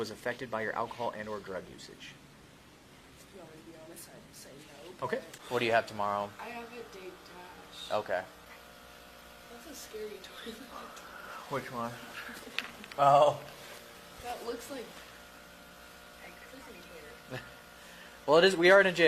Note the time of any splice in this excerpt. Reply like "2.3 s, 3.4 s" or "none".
5.3 s, 8.5 s